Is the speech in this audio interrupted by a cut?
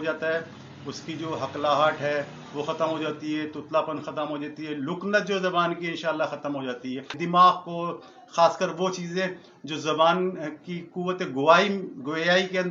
yes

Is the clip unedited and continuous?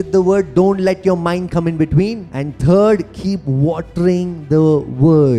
no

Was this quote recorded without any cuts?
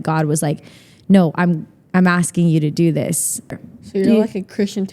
no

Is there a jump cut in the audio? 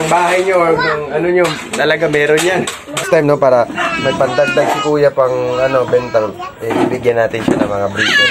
yes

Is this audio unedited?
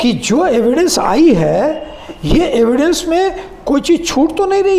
yes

